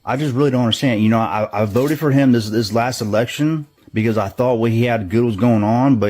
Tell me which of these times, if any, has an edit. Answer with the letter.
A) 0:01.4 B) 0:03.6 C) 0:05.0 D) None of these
A